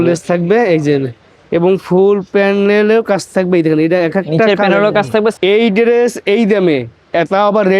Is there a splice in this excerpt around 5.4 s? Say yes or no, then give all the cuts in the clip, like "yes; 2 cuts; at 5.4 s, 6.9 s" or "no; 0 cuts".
yes; 1 cut; at 5.4 s